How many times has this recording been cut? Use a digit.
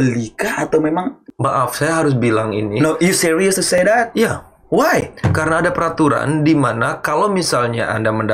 1